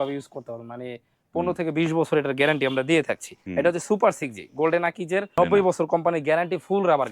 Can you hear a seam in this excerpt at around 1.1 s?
no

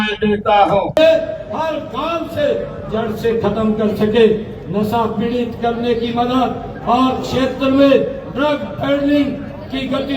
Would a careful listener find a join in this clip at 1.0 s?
yes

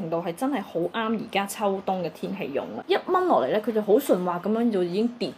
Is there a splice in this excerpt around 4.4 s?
no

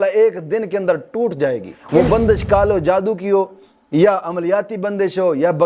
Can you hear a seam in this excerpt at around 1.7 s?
yes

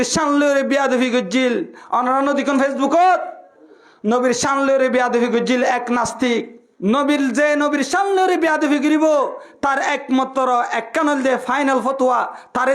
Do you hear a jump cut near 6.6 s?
yes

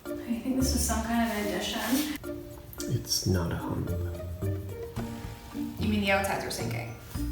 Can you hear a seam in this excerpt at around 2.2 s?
yes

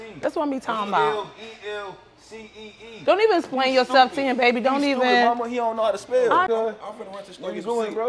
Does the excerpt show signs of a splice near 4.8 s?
no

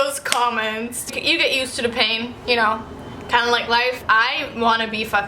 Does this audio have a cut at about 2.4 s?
yes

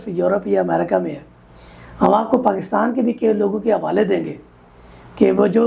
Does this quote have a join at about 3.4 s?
no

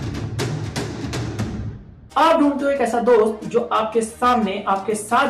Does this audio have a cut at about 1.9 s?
yes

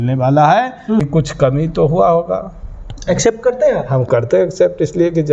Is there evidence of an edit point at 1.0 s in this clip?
yes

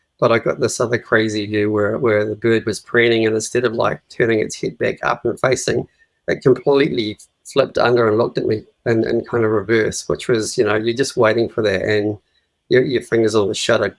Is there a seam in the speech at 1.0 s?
no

